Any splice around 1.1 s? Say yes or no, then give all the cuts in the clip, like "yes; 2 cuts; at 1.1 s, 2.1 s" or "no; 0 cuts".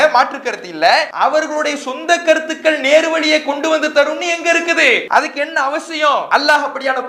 yes; 3 cuts; at 1.1 s, 5.0 s, 6.3 s